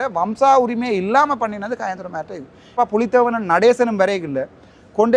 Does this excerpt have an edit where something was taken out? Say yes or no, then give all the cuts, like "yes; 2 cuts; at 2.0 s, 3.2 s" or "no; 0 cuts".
yes; 1 cut; at 2.8 s